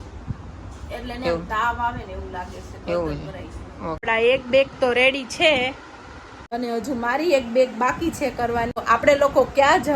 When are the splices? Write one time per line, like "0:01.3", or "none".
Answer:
0:04.0
0:08.8